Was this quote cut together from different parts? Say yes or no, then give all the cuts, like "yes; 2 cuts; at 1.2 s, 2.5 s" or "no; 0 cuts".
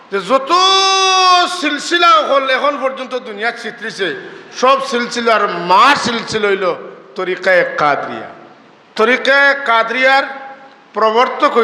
yes; 1 cut; at 8.9 s